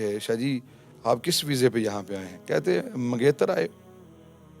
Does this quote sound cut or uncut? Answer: cut